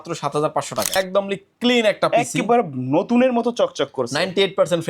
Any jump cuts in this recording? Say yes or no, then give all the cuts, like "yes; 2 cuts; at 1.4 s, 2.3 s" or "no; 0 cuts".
yes; 1 cut; at 0.9 s